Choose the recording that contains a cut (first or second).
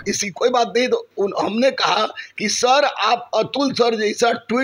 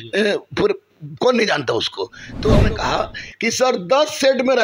second